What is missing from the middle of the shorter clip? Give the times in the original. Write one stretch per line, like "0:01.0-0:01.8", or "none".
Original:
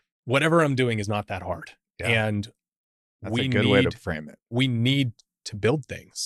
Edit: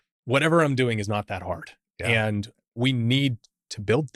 0:02.6-0:04.4